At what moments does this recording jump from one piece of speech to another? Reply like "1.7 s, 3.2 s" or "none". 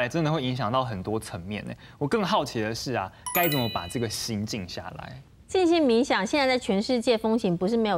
none